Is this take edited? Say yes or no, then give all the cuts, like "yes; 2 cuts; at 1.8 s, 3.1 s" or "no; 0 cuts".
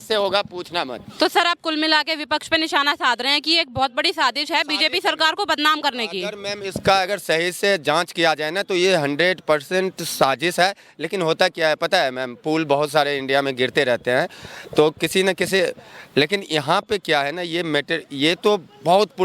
no; 0 cuts